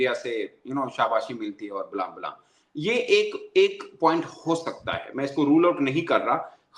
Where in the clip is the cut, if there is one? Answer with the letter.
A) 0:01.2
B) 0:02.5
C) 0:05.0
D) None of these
D